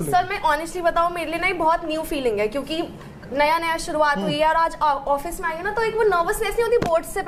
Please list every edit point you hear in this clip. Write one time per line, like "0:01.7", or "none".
none